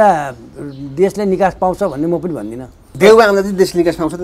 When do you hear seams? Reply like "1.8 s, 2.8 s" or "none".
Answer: 2.9 s